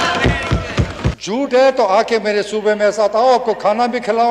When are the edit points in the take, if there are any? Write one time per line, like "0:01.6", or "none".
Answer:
0:01.2

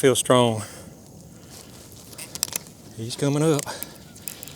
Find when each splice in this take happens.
0:02.9

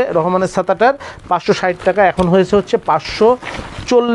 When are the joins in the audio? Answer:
none

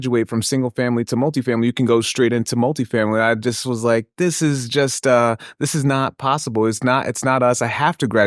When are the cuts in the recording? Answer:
none

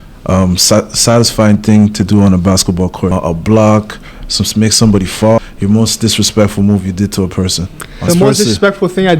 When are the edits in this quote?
0:03.1
0:05.4
0:08.1

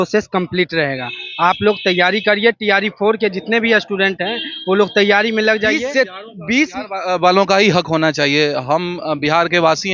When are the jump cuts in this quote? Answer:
0:05.8

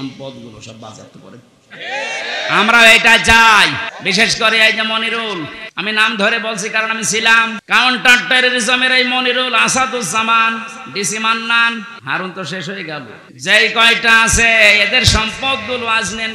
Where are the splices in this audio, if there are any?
0:03.9
0:05.6
0:07.6
0:12.0
0:13.2

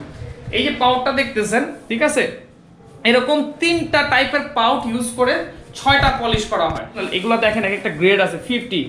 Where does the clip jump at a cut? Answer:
0:07.1

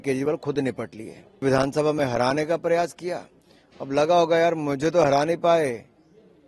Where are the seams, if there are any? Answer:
0:01.4

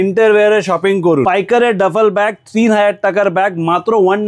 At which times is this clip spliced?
0:01.2

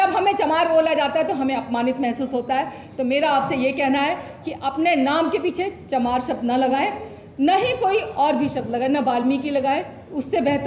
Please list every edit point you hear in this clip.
none

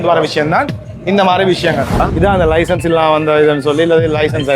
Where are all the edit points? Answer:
0:02.0

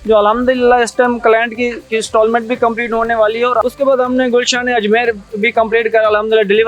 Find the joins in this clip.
0:03.6

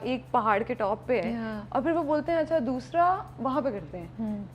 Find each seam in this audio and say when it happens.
none

